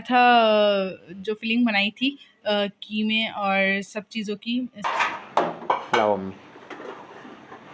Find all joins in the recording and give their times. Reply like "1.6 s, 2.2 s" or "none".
4.9 s